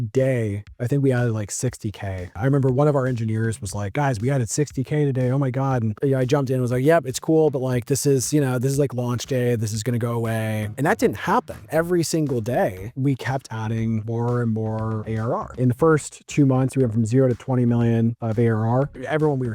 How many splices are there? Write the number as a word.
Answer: zero